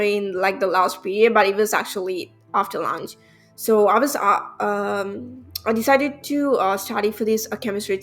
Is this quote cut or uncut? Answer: uncut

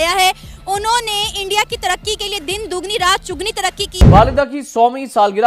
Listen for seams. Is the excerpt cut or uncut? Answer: cut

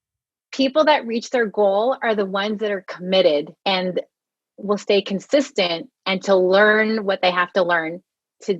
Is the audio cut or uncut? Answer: cut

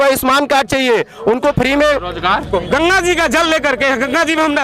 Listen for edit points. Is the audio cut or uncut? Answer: cut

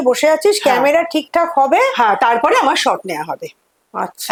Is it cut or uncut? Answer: uncut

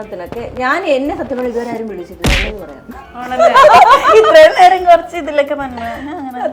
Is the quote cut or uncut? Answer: uncut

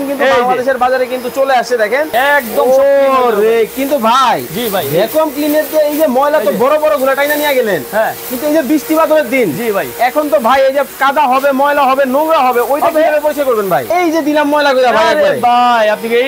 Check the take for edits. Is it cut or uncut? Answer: cut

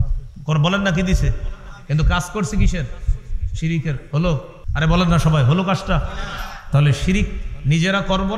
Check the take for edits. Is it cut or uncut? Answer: cut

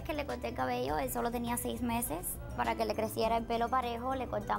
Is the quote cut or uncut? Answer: cut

